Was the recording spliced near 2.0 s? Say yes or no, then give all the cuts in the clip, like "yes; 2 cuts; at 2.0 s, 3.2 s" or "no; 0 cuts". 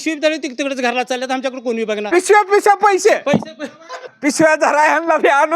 yes; 1 cut; at 2.0 s